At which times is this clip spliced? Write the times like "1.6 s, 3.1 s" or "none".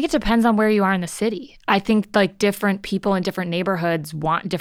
none

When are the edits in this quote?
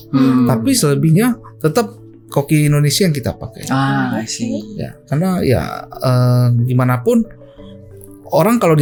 none

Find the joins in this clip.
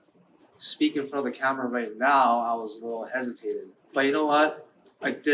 3.8 s

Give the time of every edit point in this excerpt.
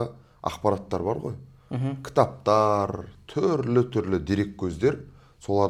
none

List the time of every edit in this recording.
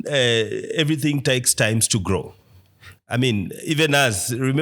none

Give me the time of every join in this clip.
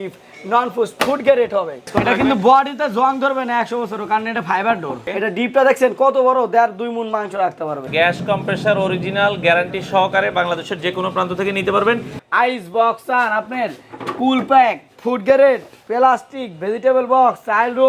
1.9 s, 5.0 s, 7.9 s, 12.2 s

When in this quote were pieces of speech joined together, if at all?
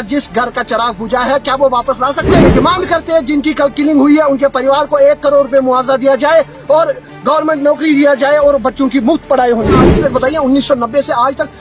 2.4 s, 9.8 s

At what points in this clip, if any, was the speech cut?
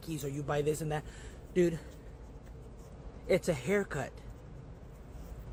none

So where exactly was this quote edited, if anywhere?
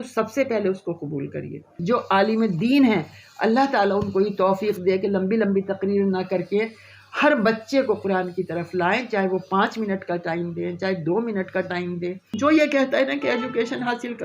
1.7 s, 12.3 s

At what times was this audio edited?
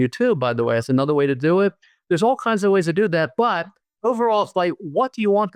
none

